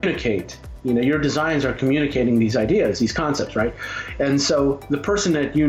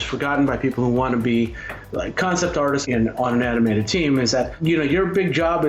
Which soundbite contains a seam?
second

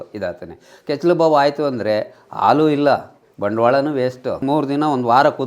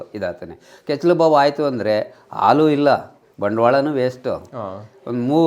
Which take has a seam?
first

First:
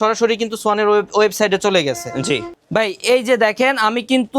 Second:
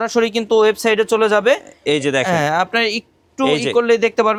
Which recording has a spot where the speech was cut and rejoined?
first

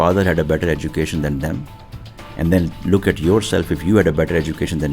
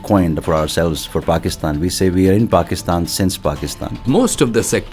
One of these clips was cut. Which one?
second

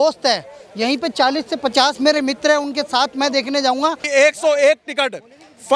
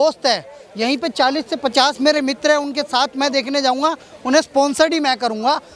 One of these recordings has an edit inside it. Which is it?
first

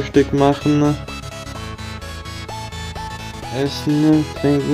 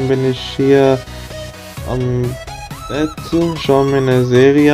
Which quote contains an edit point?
first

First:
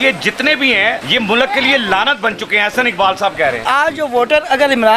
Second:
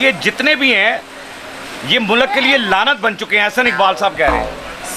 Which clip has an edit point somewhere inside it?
first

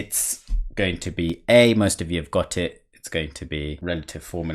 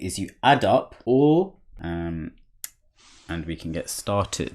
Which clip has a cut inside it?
second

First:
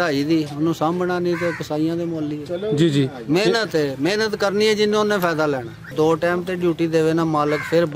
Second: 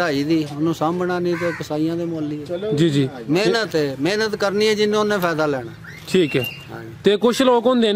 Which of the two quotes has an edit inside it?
first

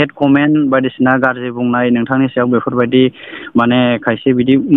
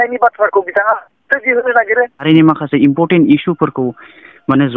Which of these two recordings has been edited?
second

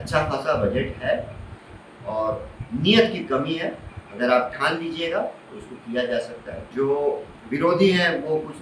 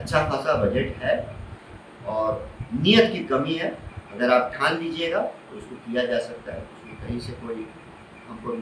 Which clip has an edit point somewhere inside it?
first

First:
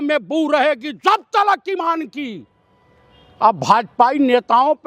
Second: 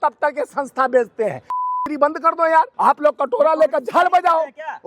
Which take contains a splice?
second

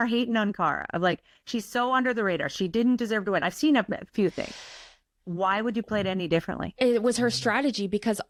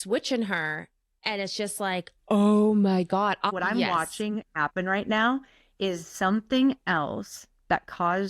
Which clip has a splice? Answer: second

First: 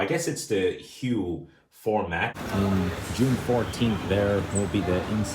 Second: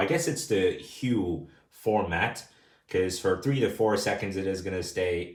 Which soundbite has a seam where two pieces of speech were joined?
first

